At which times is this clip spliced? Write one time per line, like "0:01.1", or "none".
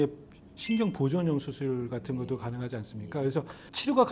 none